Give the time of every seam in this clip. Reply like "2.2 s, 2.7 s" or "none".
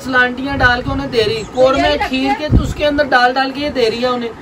none